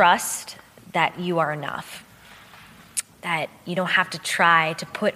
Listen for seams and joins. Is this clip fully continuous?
yes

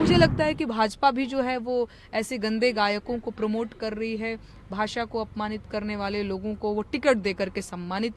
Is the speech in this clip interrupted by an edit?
no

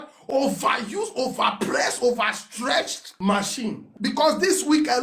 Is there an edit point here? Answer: no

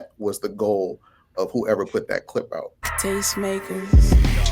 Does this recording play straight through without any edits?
no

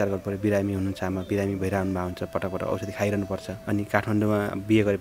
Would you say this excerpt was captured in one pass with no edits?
no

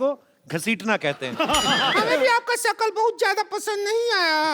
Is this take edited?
yes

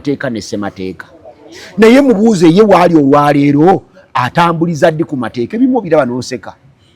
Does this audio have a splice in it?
no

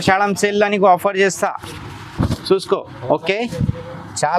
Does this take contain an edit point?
no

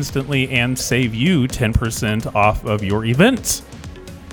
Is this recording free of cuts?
no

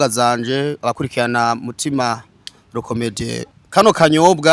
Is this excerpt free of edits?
no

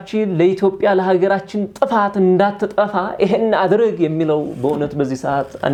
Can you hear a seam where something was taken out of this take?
no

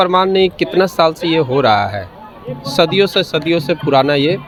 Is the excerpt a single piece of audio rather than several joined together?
yes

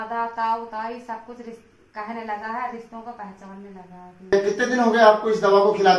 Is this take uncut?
no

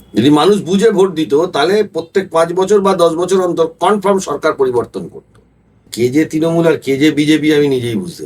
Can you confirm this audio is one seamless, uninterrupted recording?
no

